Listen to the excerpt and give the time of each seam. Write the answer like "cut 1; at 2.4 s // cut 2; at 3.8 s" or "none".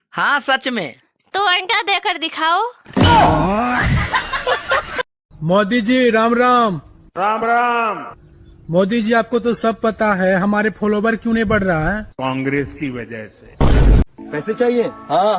cut 1; at 5.2 s